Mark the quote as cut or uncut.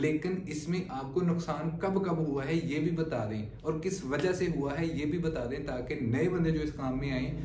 uncut